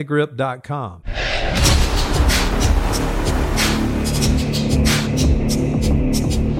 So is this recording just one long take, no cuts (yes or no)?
no